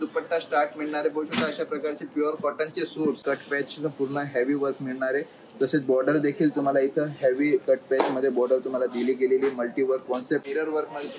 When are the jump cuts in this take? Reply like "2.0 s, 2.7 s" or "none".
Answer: 3.2 s, 10.4 s